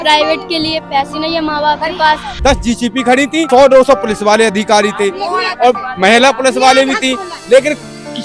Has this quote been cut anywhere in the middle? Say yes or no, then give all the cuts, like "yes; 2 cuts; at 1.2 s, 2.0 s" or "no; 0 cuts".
yes; 2 cuts; at 2.3 s, 3.5 s